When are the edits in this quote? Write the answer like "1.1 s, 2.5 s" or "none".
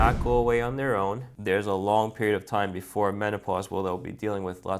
1.3 s